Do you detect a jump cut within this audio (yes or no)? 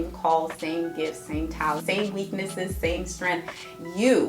yes